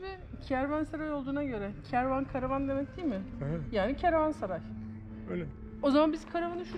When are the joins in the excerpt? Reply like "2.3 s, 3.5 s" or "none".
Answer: none